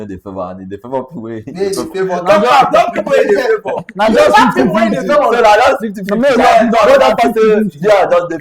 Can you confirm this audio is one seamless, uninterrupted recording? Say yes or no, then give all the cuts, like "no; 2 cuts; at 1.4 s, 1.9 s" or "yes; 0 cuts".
yes; 0 cuts